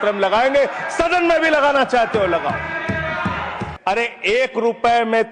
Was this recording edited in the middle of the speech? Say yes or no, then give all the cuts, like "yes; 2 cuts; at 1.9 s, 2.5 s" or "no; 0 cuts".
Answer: yes; 1 cut; at 3.7 s